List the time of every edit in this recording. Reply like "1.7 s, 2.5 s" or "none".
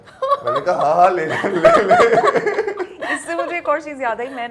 none